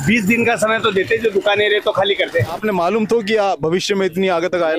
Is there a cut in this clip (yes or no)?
yes